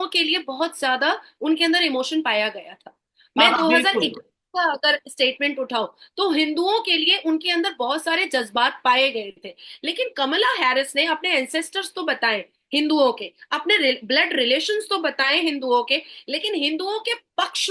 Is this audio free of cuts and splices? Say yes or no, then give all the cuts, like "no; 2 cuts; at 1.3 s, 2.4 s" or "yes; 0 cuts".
yes; 0 cuts